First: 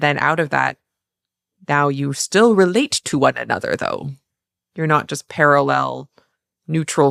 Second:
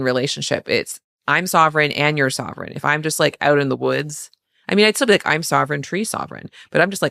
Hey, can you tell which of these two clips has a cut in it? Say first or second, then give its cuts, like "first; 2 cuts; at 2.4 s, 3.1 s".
second; 1 cut; at 1.1 s